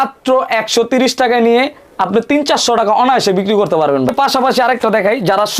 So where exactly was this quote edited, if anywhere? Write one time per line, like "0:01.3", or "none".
0:04.1